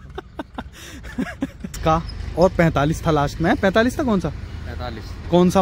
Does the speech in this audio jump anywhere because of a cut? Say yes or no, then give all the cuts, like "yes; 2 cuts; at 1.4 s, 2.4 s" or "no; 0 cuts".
yes; 1 cut; at 1.7 s